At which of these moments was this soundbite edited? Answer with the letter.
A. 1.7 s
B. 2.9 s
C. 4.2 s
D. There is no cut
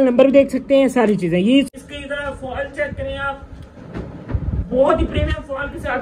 A